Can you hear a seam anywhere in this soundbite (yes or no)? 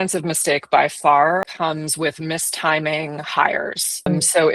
yes